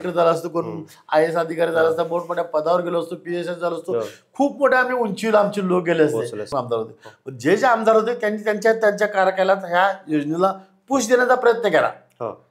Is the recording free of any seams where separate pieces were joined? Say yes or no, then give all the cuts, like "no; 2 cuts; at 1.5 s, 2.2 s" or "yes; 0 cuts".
no; 1 cut; at 6.5 s